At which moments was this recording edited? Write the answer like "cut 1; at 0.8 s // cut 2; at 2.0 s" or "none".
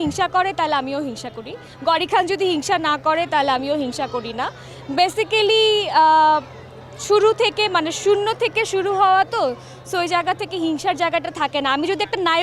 none

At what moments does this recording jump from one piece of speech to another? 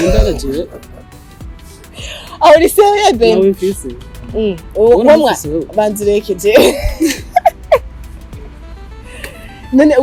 none

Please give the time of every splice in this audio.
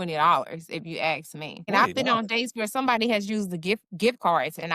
cut 1; at 1.7 s

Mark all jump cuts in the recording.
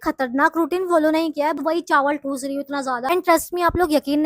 cut 1; at 1.6 s // cut 2; at 3.1 s

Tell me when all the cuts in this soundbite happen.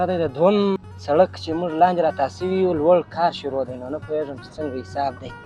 cut 1; at 0.9 s

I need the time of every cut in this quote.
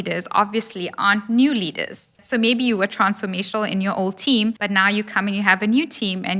cut 1; at 2.2 s // cut 2; at 4.6 s

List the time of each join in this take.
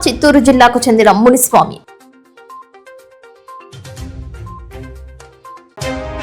cut 1; at 1.8 s

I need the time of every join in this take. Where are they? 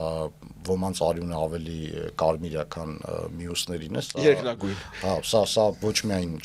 none

